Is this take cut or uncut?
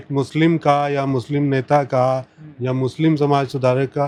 uncut